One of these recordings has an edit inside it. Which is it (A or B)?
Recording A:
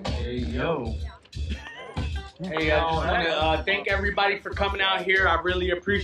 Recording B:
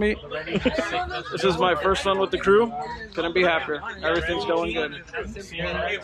A